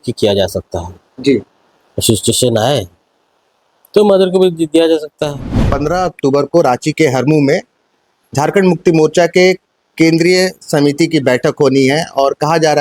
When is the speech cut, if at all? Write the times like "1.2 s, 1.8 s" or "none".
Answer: 5.6 s